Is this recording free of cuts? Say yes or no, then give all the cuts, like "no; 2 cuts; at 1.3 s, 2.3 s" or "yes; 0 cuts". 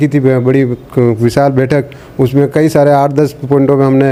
yes; 0 cuts